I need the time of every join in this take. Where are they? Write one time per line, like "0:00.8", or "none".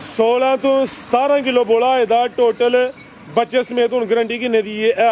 none